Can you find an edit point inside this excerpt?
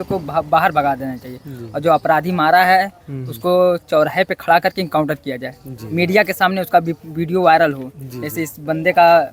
no; 0 cuts

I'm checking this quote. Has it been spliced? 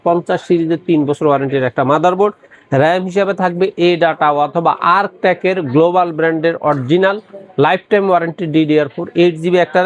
no; 0 cuts

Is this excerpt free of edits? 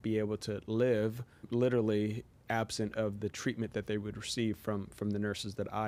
yes; 0 cuts

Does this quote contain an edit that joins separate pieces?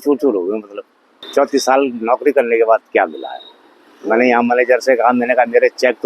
yes; 1 cut; at 1.2 s

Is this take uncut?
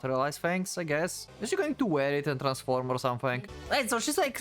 no; 2 cuts; at 1.3 s, 3.5 s

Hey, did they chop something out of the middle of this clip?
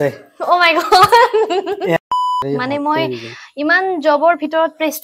yes; 1 cut; at 2.0 s

